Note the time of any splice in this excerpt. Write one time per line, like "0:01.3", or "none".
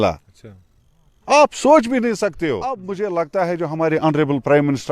0:02.8